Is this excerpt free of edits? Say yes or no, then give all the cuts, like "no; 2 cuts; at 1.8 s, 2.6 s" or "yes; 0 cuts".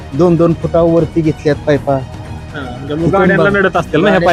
yes; 0 cuts